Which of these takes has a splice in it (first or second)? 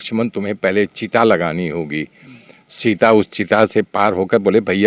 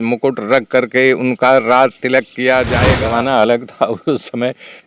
second